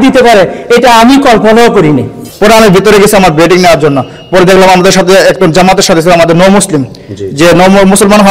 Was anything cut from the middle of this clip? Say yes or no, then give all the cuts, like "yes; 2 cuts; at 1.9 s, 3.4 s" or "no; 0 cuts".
yes; 1 cut; at 2.2 s